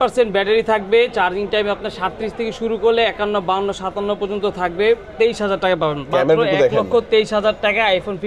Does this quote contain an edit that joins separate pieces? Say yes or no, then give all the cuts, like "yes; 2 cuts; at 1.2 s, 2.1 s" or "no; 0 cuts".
no; 0 cuts